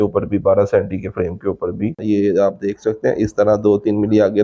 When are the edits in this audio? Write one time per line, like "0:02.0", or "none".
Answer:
0:02.0